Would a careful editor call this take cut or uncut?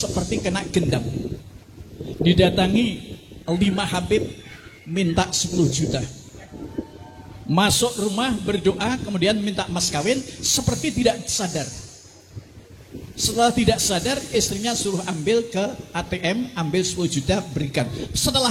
uncut